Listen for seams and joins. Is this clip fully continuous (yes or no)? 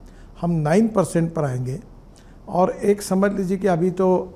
yes